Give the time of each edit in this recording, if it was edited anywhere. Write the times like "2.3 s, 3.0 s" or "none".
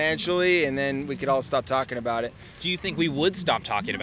none